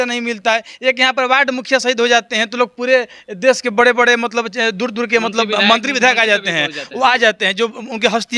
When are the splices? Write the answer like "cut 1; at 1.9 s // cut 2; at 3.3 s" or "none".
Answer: none

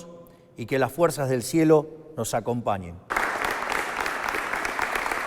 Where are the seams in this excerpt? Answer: cut 1; at 3.1 s

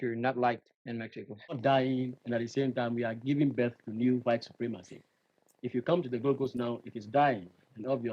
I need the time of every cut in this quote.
cut 1; at 1.6 s

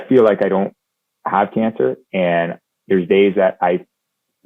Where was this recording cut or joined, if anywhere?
none

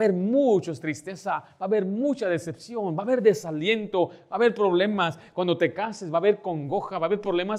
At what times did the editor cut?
none

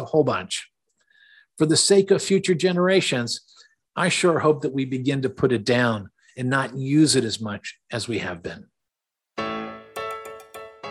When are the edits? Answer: cut 1; at 9.3 s

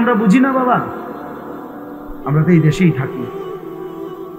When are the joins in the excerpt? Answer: cut 1; at 3.0 s

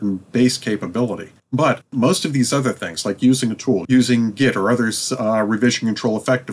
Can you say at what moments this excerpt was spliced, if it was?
cut 1; at 1.8 s // cut 2; at 3.8 s

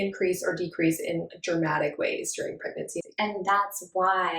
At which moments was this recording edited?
cut 1; at 3.0 s

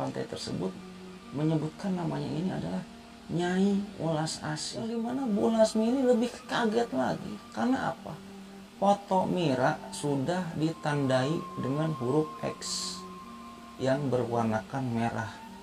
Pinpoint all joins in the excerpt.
cut 1; at 4.9 s

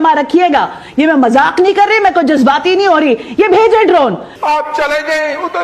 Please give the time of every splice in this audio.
cut 1; at 4.3 s

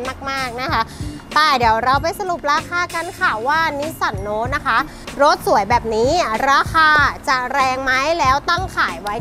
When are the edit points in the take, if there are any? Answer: none

